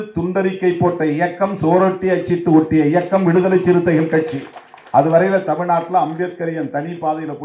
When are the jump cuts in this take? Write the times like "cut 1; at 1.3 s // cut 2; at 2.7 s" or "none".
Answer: none